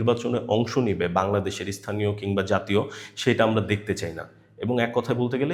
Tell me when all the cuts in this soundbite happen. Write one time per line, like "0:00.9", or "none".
none